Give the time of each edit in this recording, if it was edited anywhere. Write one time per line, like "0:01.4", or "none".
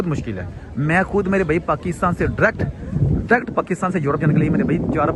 none